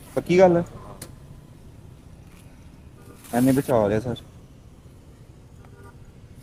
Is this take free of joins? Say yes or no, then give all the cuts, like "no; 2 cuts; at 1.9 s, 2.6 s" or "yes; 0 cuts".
yes; 0 cuts